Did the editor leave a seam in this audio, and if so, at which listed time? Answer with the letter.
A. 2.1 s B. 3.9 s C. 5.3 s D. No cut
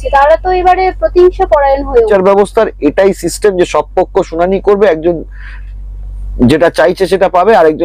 A